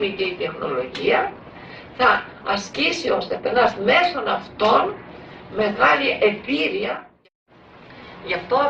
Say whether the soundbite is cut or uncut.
cut